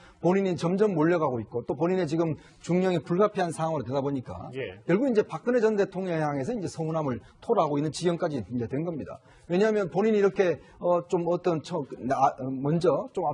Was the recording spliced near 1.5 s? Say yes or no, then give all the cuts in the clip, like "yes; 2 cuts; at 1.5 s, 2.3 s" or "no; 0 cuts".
no; 0 cuts